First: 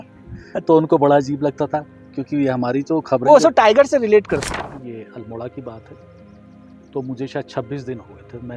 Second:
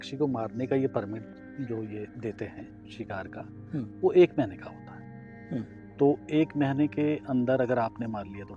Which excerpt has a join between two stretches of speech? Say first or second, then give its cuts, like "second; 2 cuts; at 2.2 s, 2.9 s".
first; 1 cut; at 4.4 s